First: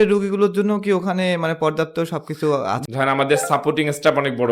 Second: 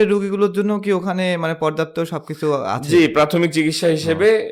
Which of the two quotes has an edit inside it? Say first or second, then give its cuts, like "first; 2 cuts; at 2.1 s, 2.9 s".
first; 1 cut; at 2.8 s